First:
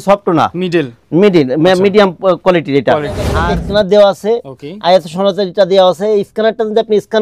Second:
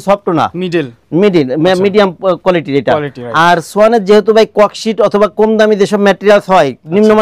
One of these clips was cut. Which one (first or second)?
first